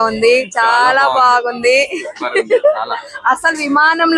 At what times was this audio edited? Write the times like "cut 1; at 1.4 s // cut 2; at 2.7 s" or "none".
none